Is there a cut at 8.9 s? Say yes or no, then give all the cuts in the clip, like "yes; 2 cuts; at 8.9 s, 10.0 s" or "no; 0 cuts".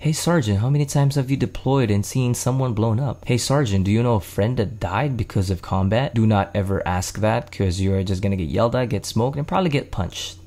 no; 2 cuts; at 3.2 s, 6.1 s